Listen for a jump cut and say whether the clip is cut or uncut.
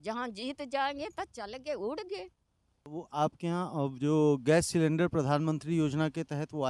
cut